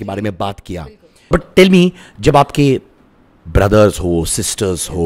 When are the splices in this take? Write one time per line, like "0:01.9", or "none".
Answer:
0:01.1